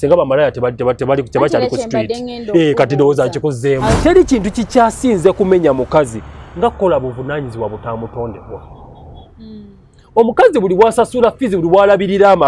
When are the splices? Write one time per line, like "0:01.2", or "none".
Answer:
0:04.0